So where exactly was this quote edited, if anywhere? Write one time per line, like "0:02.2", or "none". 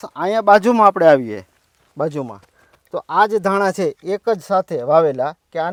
none